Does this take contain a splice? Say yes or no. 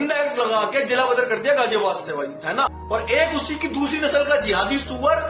yes